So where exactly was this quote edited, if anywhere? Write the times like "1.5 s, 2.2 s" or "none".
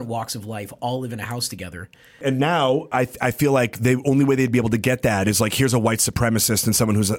2.2 s